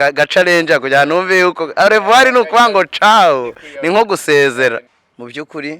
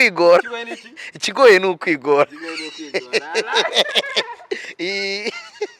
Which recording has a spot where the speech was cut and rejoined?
first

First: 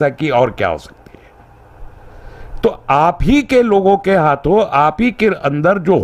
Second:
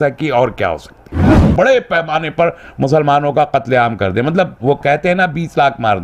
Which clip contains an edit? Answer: second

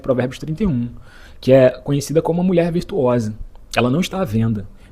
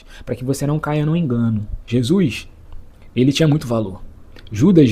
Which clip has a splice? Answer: second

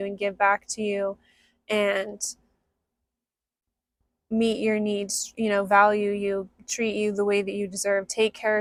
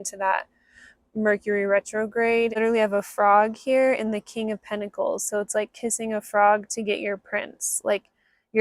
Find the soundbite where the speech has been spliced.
second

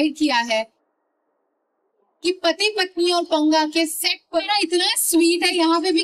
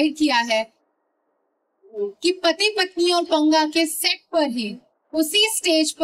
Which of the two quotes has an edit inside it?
first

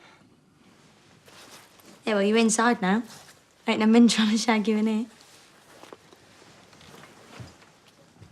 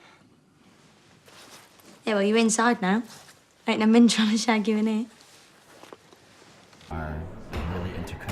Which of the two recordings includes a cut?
first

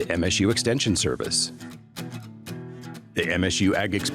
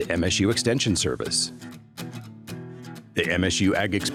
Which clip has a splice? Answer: first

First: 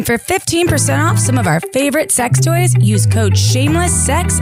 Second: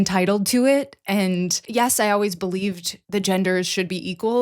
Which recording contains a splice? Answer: second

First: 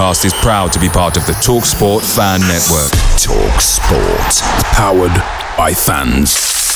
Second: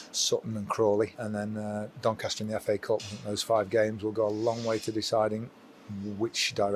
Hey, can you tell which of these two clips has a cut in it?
second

